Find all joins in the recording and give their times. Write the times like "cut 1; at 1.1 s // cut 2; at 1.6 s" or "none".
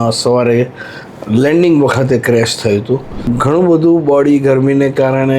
cut 1; at 3.2 s